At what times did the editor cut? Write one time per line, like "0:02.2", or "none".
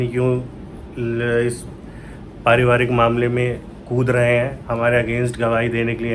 none